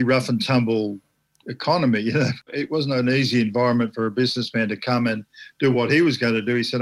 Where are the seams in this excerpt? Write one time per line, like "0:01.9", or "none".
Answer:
0:02.4